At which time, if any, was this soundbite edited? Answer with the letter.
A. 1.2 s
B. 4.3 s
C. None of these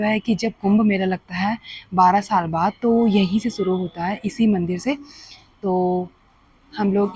C